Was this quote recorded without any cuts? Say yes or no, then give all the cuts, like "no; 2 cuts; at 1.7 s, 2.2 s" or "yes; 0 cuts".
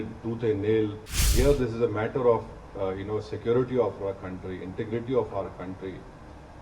no; 1 cut; at 1.3 s